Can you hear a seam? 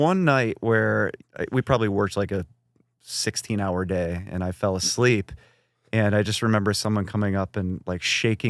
yes; 1 cut; at 1.2 s

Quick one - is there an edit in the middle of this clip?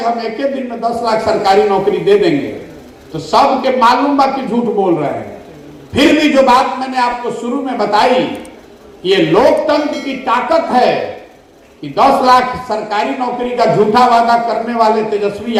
no; 0 cuts

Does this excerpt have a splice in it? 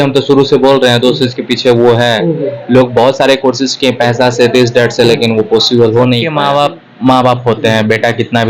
yes; 1 cut; at 6.3 s

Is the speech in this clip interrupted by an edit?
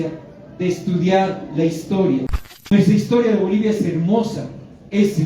yes; 1 cut; at 2.4 s

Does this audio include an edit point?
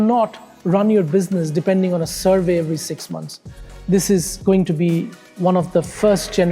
yes; 1 cut; at 3.6 s

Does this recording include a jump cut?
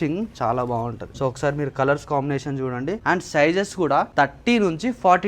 yes; 3 cuts; at 1.1 s, 3.0 s, 4.1 s

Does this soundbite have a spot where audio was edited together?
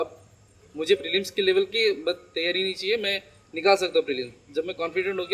no; 0 cuts

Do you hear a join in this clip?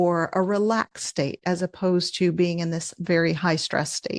no; 0 cuts

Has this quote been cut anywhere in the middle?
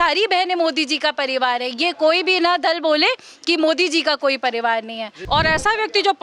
yes; 1 cut; at 5.1 s

